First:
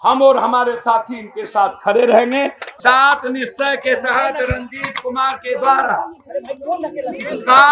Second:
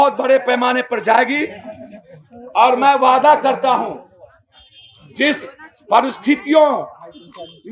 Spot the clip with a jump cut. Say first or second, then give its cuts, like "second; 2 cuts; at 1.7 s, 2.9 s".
first; 1 cut; at 2.6 s